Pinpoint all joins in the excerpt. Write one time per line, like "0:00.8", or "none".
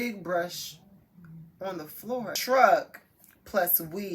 0:02.4